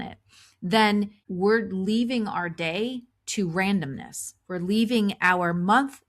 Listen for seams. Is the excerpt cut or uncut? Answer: cut